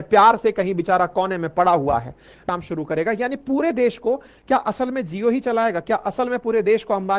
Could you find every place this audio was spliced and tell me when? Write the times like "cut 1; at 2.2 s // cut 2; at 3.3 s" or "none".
cut 1; at 2.4 s